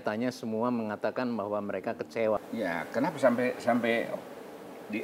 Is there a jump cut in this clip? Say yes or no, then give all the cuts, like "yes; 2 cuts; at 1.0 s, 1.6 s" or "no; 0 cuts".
yes; 1 cut; at 2.4 s